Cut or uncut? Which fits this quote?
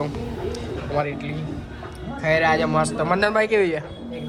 uncut